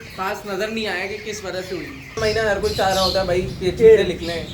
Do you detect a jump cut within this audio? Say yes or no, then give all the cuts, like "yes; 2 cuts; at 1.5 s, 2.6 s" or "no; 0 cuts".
yes; 1 cut; at 2.2 s